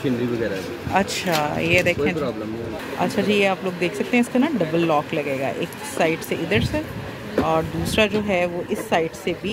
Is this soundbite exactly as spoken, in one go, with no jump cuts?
no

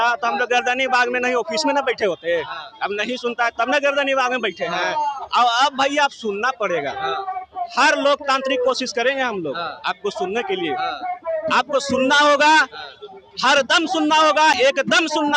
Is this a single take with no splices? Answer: yes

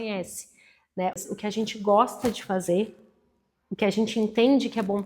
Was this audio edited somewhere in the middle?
yes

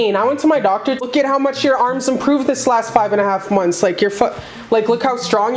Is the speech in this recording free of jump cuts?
no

